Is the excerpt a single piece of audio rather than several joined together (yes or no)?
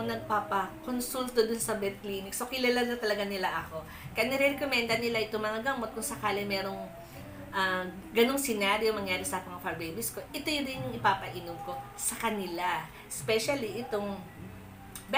yes